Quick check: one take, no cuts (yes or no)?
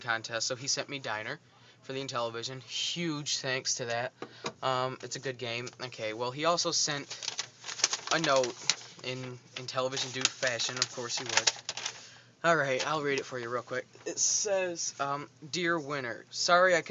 yes